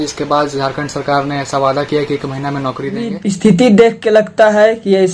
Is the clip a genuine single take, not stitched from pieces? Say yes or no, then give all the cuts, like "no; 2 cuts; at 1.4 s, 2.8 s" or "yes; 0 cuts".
no; 1 cut; at 3.2 s